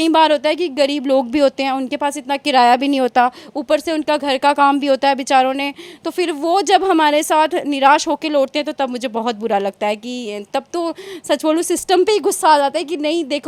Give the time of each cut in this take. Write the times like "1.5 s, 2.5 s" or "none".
none